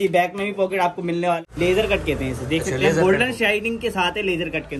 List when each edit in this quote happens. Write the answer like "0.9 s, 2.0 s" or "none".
1.4 s